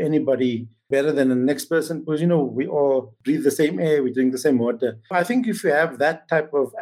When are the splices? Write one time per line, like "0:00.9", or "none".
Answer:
0:05.1

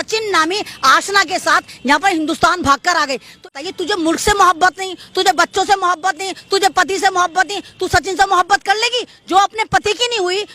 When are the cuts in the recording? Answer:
0:03.5

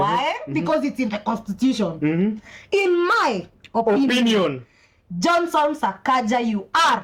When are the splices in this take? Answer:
none

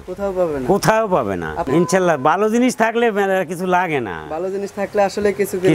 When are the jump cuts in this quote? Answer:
0:01.7

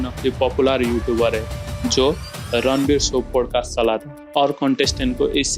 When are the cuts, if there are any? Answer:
0:04.2

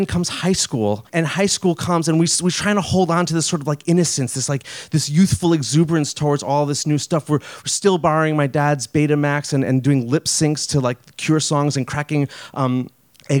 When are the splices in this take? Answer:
0:01.1

